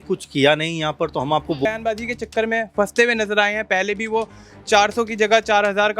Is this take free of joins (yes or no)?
no